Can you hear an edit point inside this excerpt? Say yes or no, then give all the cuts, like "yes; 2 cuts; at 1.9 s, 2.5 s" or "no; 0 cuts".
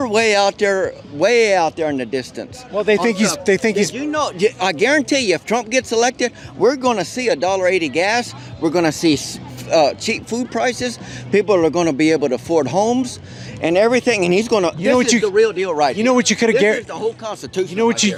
no; 0 cuts